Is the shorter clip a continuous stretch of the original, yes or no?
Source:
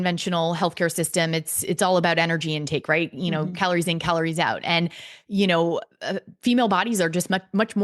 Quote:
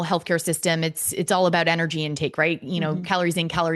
yes